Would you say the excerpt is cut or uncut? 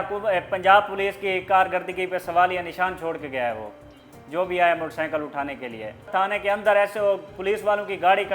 cut